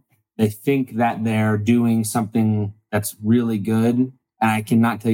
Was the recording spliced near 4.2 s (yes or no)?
no